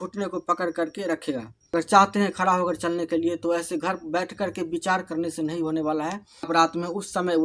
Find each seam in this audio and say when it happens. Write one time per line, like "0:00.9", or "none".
0:01.7
0:06.5